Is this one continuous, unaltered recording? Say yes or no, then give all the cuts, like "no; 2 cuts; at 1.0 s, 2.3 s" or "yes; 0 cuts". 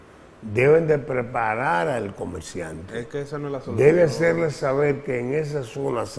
yes; 0 cuts